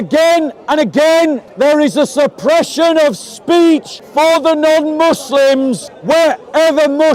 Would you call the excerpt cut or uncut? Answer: cut